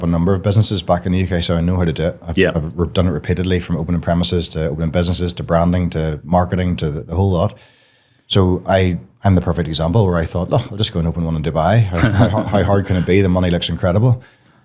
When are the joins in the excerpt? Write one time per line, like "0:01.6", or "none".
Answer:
none